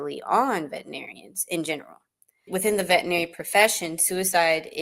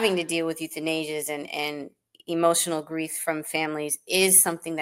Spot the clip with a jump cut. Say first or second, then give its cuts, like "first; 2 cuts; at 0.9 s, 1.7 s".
first; 1 cut; at 2.5 s